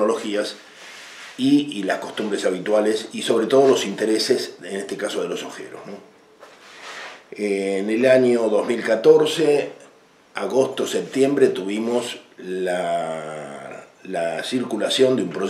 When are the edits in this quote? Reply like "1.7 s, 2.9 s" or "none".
none